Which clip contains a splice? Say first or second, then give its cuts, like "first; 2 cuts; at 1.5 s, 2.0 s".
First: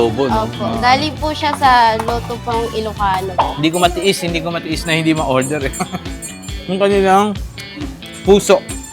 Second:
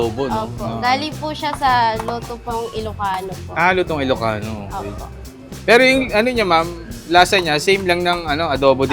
first; 1 cut; at 3.4 s